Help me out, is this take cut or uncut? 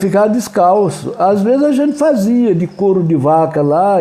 uncut